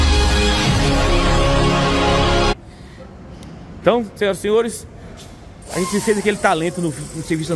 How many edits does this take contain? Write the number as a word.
one